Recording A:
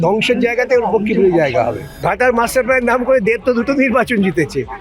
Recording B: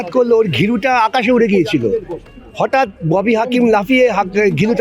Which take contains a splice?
A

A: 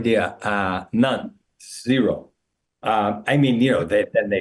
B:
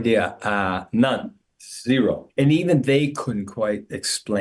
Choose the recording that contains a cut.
B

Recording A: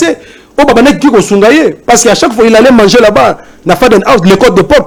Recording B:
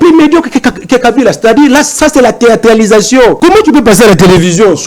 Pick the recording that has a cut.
B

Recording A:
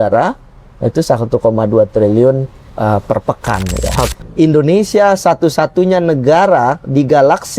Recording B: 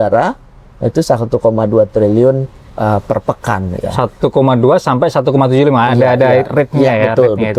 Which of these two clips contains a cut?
A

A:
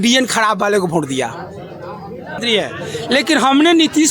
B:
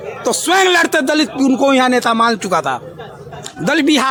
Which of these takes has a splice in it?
A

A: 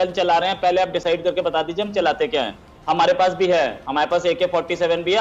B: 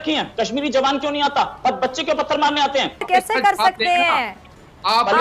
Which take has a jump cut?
B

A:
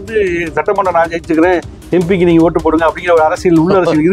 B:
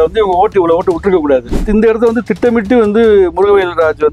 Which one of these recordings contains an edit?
B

